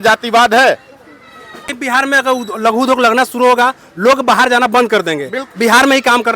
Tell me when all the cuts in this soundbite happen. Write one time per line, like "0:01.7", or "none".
0:01.8